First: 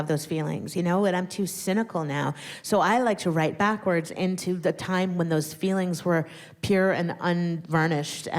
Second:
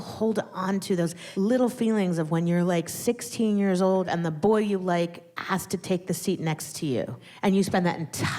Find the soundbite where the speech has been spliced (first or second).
second